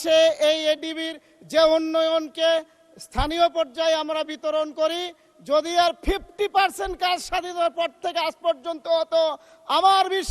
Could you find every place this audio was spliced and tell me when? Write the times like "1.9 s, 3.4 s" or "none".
none